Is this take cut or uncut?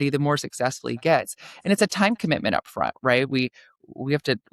uncut